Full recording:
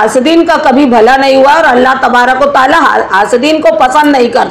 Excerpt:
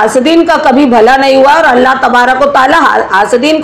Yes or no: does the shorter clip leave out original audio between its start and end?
no